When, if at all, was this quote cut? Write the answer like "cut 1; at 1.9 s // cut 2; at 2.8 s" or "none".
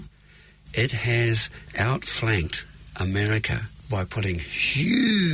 cut 1; at 1.7 s // cut 2; at 3.7 s